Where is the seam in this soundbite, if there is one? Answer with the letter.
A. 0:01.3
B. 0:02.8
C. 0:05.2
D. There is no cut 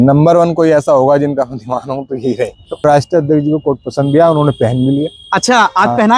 B